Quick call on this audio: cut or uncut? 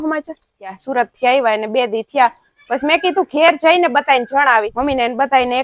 cut